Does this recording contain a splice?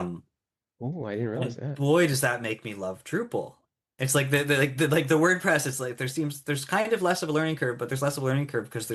no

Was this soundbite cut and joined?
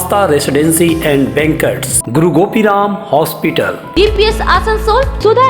yes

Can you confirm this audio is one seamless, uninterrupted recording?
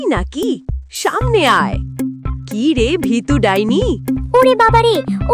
no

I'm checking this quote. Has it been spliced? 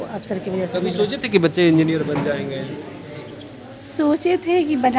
no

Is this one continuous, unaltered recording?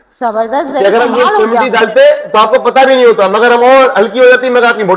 yes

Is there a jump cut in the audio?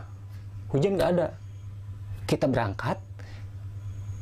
no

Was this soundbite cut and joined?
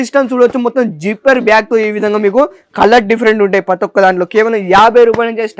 no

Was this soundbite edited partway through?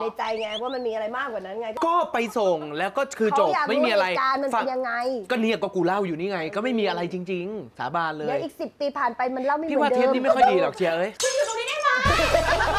yes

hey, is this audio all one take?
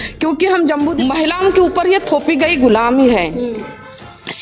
no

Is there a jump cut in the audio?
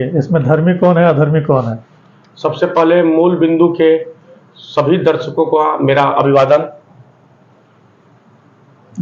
no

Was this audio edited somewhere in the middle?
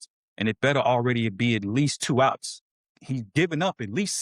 yes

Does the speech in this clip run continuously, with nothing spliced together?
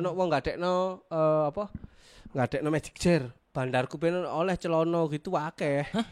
no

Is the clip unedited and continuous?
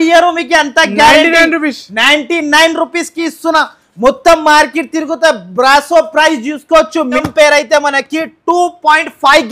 no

